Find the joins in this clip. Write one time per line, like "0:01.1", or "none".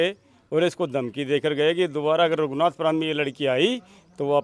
none